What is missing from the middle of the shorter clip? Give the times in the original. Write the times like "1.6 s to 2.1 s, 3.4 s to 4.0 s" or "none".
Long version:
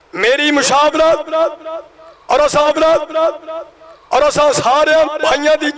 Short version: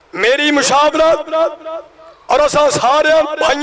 2.6 s to 4.5 s

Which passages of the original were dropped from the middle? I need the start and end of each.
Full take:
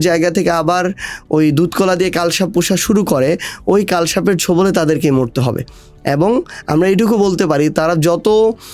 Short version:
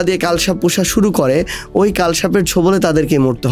none

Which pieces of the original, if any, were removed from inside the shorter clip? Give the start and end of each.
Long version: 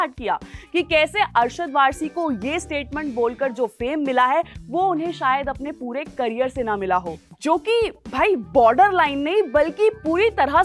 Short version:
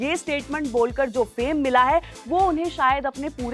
none

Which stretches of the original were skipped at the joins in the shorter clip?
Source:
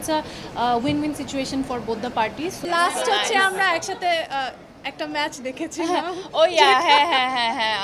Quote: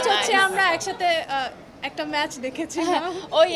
none

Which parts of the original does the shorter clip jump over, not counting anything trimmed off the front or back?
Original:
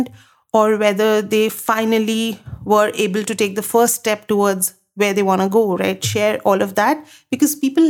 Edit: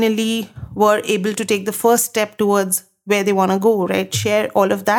none

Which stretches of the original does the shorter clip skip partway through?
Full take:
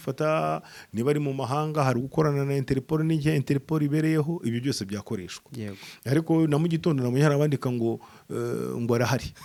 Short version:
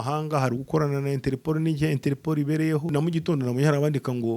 4.4 s to 6.5 s

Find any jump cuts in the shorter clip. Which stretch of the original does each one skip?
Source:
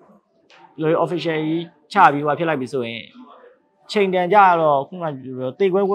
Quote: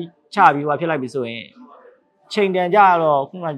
none

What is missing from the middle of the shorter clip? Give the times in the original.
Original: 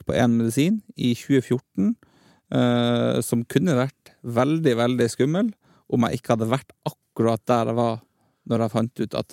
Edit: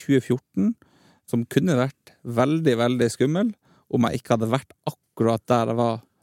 2.5 s to 3.2 s

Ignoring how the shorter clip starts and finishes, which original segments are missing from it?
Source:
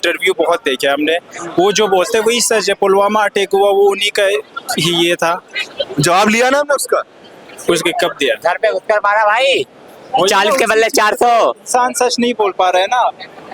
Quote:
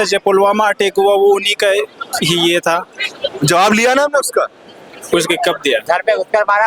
none

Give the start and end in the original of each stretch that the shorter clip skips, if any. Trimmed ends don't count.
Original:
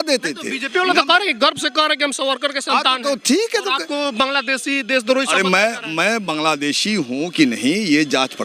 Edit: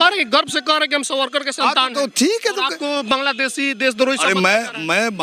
none

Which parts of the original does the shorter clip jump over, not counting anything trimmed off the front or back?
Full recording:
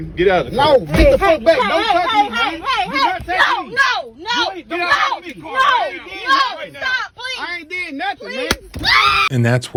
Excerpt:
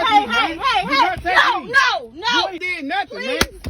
4.6 s to 7.7 s

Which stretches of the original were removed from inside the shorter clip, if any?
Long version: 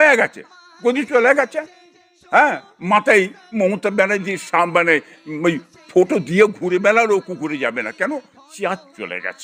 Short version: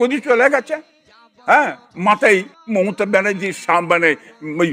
none

